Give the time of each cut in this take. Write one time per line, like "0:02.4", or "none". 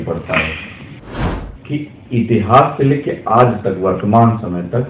0:01.1